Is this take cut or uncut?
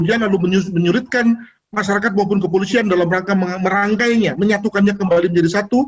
uncut